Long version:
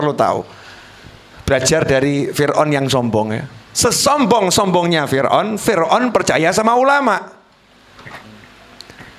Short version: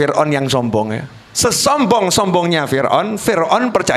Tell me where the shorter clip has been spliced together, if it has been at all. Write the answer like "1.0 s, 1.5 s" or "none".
none